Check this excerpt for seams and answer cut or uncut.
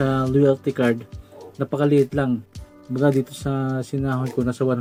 uncut